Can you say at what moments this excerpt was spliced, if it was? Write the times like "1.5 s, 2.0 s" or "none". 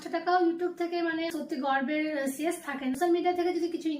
1.3 s, 2.9 s

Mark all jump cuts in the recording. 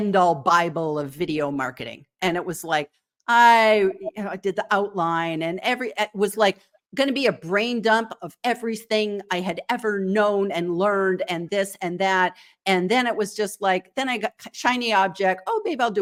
none

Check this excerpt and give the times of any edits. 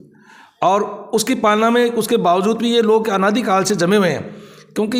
none

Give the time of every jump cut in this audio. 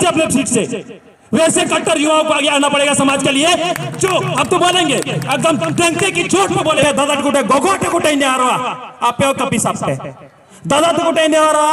6.8 s

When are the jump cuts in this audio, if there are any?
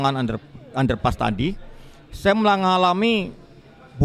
none

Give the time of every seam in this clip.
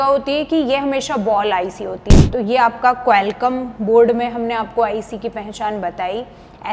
2.1 s

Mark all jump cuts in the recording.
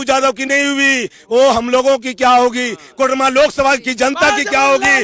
none

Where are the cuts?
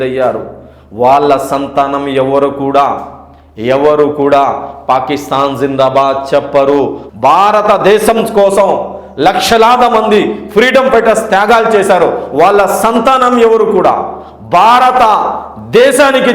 7.0 s

